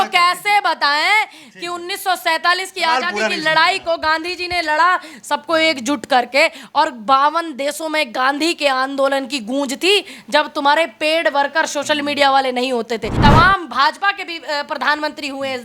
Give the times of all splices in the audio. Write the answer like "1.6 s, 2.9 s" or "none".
13.1 s